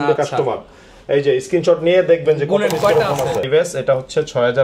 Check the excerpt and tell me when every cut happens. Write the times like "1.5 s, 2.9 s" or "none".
3.5 s